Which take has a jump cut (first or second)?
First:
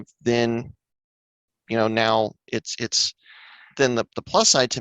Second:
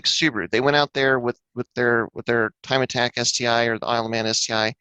first